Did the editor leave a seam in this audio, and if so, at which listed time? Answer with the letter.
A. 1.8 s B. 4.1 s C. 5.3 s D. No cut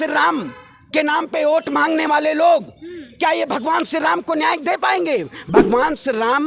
C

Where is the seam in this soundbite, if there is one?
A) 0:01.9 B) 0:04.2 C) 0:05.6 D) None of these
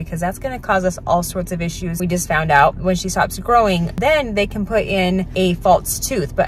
A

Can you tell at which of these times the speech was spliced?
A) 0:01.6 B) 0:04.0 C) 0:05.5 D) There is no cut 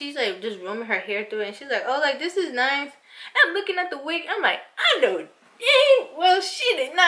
D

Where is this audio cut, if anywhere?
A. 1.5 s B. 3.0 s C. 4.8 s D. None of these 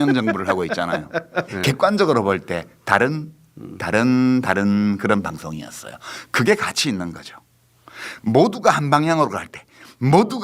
A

